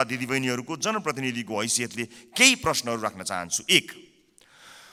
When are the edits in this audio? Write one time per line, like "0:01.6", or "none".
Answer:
none

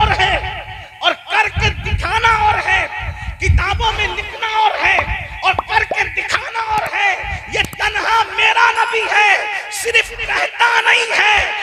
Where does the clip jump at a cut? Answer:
none

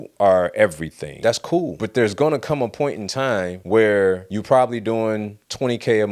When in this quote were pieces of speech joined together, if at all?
0:01.4

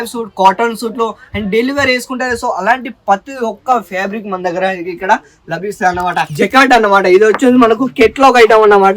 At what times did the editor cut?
0:06.3

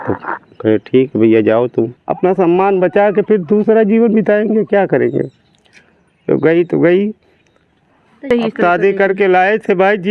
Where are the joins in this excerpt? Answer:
0:02.0
0:08.3

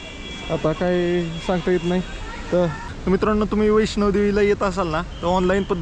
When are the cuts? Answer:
0:02.8

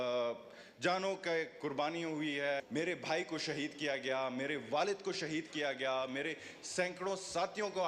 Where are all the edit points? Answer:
0:02.6

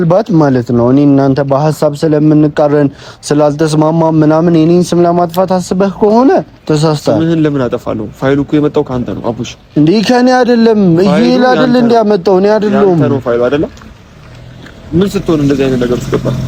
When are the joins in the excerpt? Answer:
none

